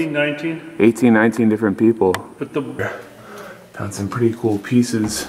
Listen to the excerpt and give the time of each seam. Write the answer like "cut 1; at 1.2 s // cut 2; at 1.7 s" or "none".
cut 1; at 2.8 s